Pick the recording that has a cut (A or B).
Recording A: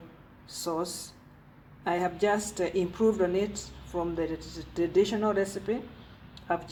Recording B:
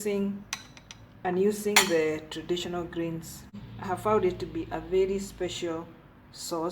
B